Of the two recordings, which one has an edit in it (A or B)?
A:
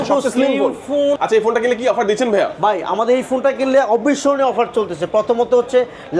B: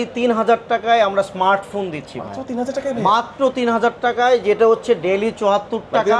A